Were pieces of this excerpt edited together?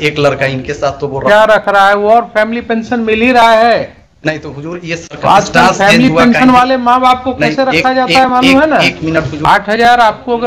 yes; 1 cut; at 9.3 s

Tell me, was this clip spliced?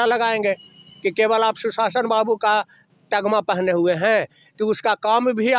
no; 0 cuts

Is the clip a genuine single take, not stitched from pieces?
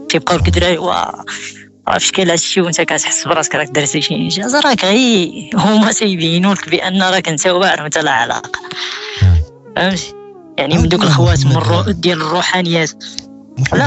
yes; 0 cuts

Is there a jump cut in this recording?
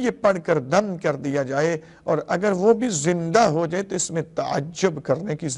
no; 0 cuts

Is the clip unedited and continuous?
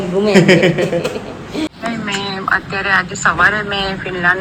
yes; 0 cuts

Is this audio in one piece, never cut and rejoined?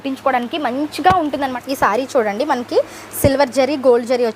no; 1 cut; at 1.5 s

